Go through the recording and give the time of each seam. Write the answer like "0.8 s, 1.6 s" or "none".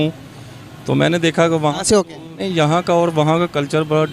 2.5 s